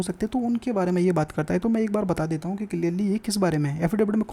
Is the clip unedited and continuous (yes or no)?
yes